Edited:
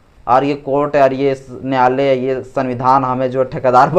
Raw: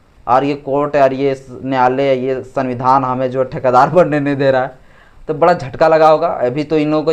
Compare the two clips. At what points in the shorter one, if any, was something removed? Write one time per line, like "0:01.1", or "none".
none